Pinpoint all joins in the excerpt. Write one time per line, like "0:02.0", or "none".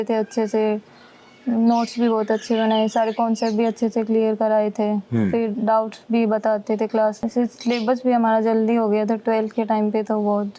0:07.2